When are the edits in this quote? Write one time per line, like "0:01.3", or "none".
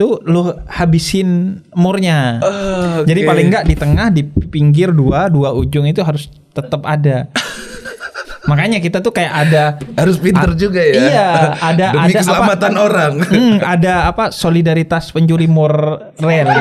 none